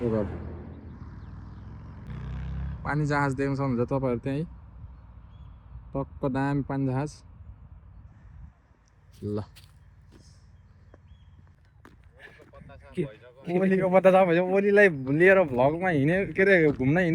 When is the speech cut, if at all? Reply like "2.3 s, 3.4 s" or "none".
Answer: 2.1 s, 11.5 s